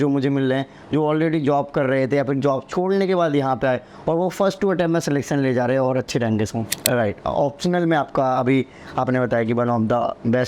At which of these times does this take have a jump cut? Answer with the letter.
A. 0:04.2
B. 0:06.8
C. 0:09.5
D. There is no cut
B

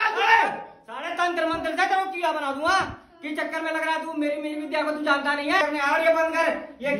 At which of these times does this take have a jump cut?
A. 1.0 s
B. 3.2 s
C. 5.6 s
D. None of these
C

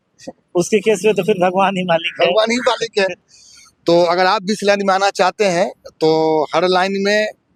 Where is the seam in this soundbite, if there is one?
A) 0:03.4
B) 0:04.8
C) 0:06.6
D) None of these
D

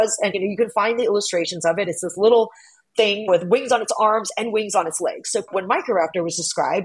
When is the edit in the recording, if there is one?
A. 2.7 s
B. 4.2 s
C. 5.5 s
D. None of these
C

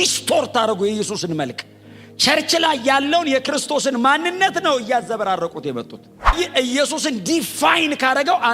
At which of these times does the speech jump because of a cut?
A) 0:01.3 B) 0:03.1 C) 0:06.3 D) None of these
C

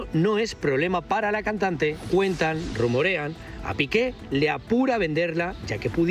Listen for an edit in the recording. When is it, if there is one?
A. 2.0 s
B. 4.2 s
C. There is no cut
A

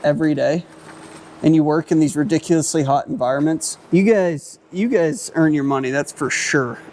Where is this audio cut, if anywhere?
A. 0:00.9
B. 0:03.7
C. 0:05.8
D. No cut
B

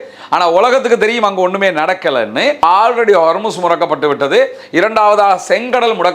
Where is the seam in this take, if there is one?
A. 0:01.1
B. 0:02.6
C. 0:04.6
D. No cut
B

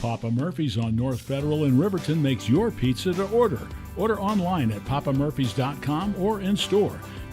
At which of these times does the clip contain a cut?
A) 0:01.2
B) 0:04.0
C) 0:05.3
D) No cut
A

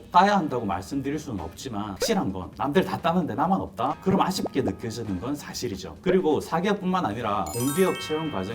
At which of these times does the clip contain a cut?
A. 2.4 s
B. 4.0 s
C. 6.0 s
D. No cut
B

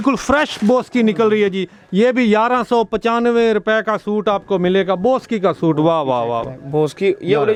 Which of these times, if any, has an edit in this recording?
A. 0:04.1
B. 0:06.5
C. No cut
C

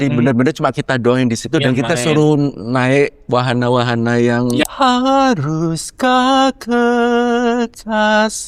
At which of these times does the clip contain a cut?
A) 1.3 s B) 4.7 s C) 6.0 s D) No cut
B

